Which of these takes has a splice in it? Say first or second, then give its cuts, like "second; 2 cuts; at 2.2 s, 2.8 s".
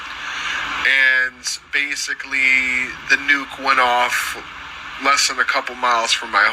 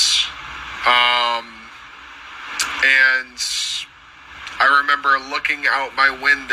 first; 1 cut; at 2.3 s